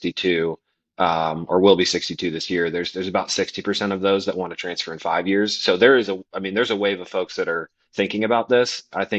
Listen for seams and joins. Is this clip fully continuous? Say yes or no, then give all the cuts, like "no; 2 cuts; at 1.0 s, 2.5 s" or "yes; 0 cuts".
yes; 0 cuts